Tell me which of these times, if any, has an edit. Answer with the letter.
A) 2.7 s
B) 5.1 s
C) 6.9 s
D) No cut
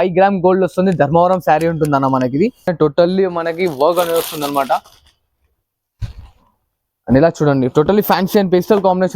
A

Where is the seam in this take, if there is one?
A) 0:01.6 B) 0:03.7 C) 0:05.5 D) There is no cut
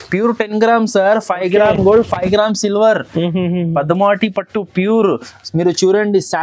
D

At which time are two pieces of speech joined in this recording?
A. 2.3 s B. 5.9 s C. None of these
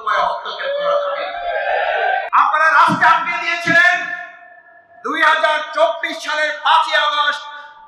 A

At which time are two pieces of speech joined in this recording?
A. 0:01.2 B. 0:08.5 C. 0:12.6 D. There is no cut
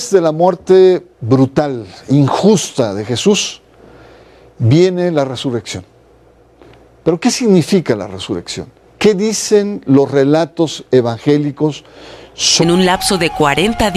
D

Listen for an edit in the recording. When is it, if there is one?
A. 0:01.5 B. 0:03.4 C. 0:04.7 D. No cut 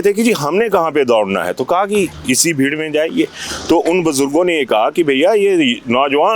D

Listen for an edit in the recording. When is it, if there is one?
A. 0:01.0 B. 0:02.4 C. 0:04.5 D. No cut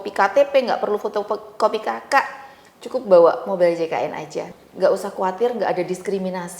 C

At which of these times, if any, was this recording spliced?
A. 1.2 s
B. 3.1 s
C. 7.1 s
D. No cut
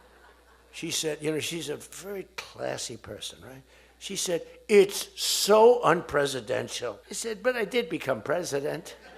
C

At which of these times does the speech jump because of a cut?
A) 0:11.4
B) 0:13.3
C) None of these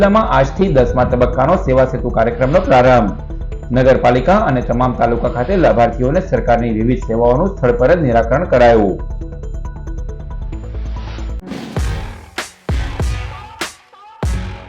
A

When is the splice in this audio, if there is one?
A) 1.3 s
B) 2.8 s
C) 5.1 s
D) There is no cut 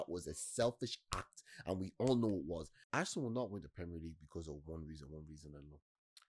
B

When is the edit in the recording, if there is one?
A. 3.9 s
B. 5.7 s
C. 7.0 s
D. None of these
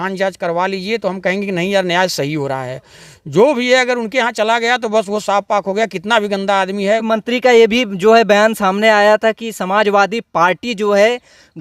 C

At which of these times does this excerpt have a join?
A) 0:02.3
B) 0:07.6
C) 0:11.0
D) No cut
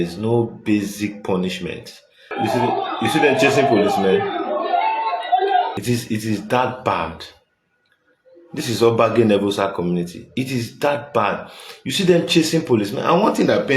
A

